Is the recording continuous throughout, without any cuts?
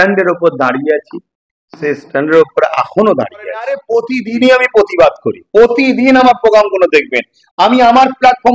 no; 1 cut; at 3.8 s

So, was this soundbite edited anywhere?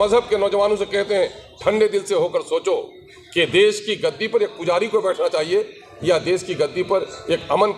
no; 0 cuts

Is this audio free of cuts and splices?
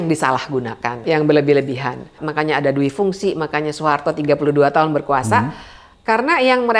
no; 2 cuts; at 1.0 s, 2.2 s

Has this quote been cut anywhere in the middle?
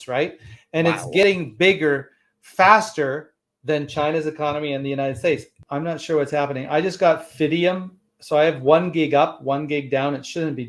yes; 1 cut; at 5.6 s

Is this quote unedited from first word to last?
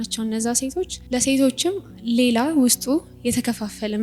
no; 1 cut; at 1.0 s

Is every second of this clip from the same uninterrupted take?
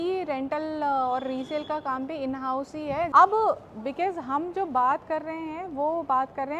no; 1 cut; at 3.1 s

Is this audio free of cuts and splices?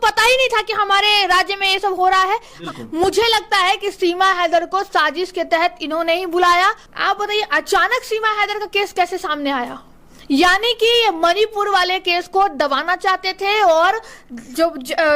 no; 2 cuts; at 2.6 s, 6.9 s

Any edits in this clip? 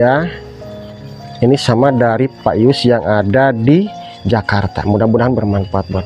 no; 0 cuts

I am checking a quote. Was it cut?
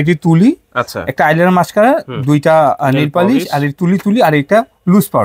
no; 0 cuts

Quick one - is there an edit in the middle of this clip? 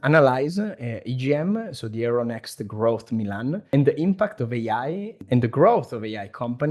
yes; 2 cuts; at 3.6 s, 5.2 s

